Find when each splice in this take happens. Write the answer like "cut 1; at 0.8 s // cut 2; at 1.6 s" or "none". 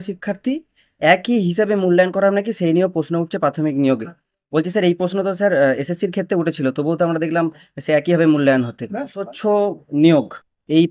cut 1; at 9.3 s